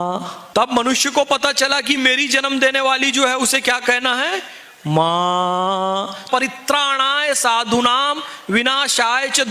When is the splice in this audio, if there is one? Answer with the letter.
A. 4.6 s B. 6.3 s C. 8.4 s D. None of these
B